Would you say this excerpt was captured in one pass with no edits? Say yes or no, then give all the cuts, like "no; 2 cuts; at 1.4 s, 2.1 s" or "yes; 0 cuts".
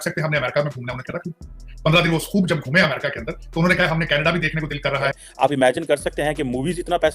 no; 1 cut; at 5.1 s